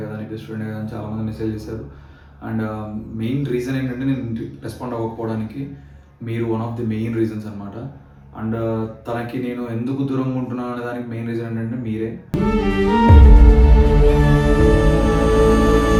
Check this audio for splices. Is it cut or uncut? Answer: uncut